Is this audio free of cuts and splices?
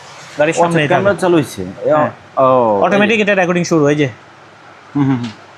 yes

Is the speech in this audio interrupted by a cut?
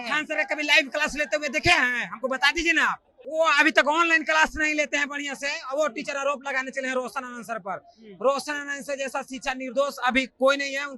yes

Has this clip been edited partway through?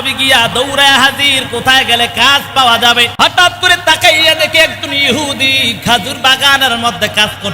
yes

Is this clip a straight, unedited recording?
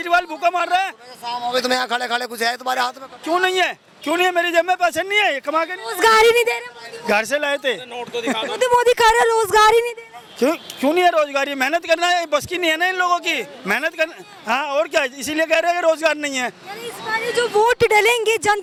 yes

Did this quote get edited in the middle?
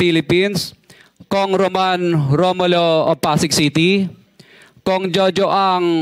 no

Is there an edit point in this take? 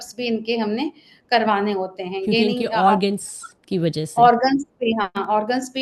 no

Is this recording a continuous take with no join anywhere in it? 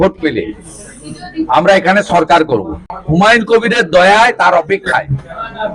no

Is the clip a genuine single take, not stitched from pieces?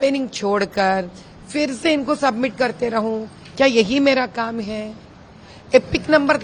yes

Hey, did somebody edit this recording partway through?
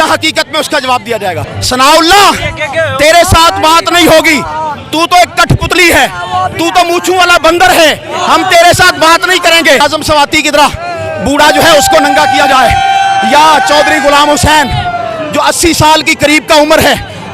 yes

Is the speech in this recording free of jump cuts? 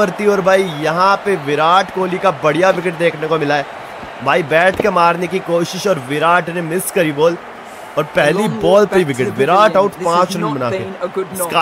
yes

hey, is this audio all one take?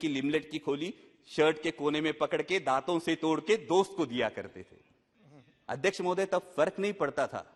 yes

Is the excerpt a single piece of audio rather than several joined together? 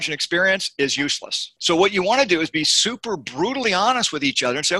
no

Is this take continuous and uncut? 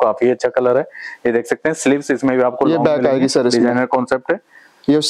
yes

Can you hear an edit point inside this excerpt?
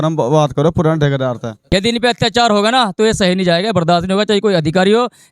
yes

